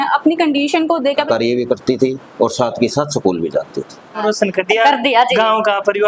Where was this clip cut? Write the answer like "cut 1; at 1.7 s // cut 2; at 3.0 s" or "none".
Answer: cut 1; at 1.2 s // cut 2; at 4.2 s